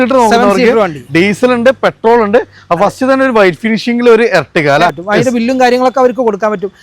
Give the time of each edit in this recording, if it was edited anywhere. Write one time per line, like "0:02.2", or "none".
0:05.0